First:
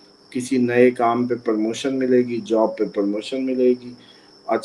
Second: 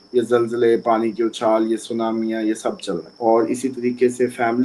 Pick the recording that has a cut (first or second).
second